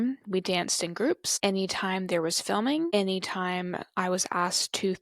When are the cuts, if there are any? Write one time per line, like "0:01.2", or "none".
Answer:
0:01.3
0:02.9